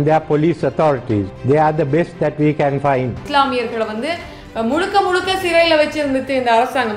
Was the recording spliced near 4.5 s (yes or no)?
no